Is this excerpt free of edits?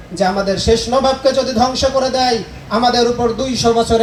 yes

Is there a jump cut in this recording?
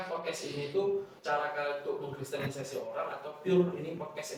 no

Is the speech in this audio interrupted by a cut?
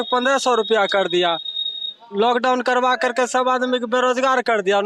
no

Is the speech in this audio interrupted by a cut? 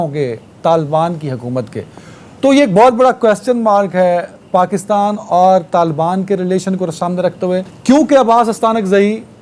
yes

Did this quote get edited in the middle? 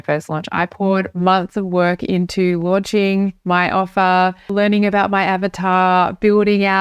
yes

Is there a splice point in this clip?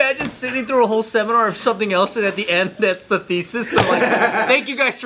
no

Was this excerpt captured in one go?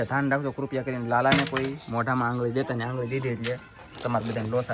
yes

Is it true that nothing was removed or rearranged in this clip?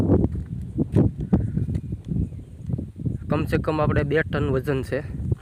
yes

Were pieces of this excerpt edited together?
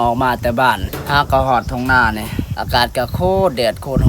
yes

